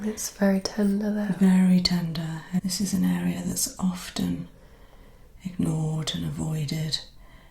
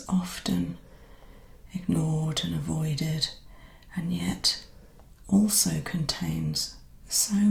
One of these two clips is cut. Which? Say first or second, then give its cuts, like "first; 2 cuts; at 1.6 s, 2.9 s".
first; 1 cut; at 2.7 s